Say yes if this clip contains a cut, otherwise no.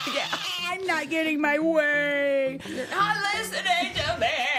no